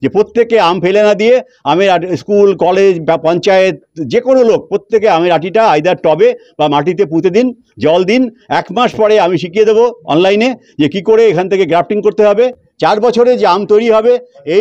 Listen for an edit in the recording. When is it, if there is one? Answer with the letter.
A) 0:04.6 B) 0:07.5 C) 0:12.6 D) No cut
C